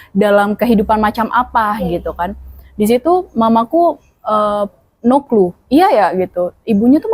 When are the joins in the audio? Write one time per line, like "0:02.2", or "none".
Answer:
none